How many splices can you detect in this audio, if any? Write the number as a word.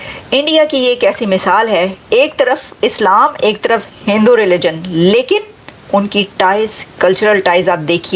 one